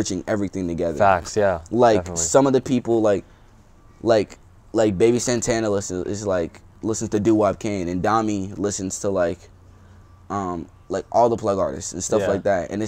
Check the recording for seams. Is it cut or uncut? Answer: uncut